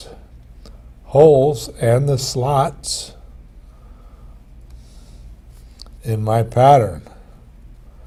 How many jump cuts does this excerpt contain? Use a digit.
0